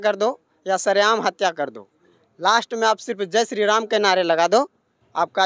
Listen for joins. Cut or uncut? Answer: uncut